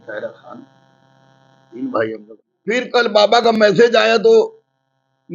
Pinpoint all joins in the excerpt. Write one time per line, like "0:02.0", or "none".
0:02.6